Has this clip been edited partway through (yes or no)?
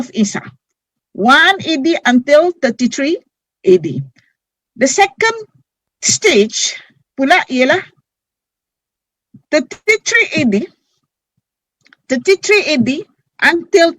no